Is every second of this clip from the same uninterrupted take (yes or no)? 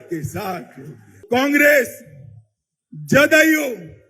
no